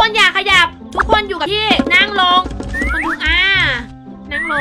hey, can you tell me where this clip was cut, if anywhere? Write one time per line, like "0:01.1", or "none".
0:01.4